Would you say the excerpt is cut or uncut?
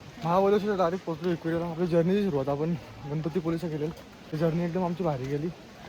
cut